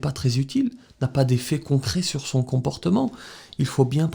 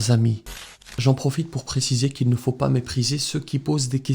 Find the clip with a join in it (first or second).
second